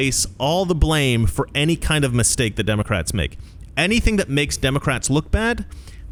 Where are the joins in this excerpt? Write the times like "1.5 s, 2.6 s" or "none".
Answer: none